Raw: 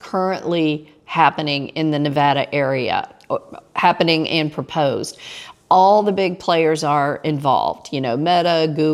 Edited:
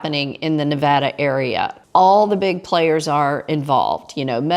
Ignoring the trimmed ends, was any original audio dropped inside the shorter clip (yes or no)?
yes